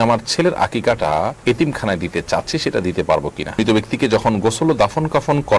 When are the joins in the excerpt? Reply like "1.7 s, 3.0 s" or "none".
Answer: 1.4 s, 3.6 s